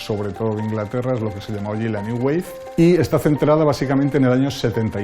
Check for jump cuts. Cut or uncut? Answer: cut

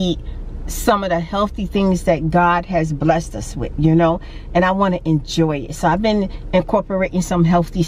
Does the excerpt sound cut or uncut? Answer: uncut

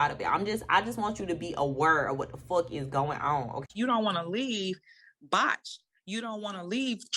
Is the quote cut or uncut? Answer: cut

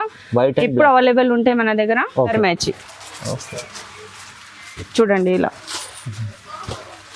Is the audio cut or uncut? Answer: cut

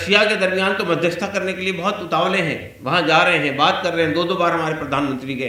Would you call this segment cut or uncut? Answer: uncut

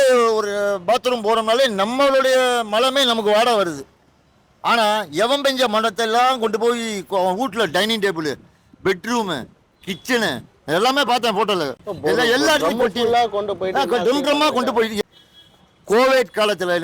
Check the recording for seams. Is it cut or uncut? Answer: cut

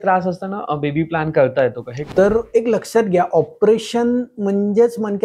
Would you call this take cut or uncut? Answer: cut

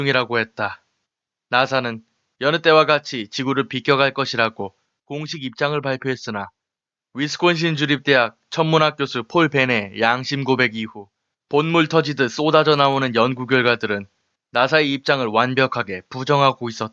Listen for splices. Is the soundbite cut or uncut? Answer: cut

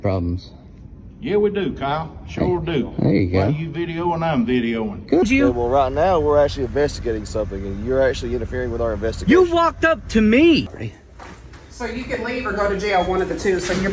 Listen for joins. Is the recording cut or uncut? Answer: cut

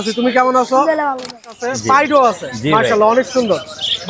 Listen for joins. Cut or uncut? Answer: cut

